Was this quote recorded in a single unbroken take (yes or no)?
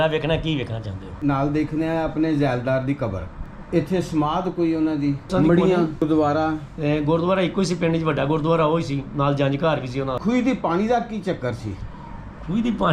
no